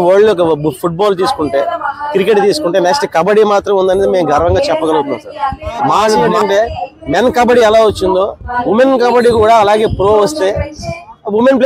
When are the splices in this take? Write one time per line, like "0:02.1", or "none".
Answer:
0:06.3